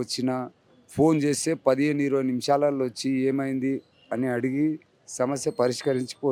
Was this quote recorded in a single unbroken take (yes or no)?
yes